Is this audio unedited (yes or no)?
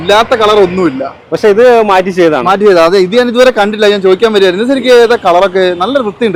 yes